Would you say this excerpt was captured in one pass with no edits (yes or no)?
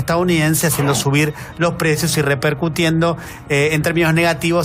yes